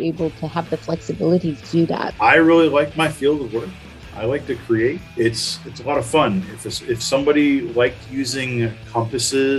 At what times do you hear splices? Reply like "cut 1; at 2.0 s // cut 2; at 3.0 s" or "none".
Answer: cut 1; at 2.1 s // cut 2; at 5.0 s